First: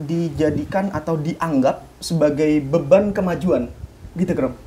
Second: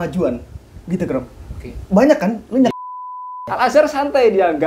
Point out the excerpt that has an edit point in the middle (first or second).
second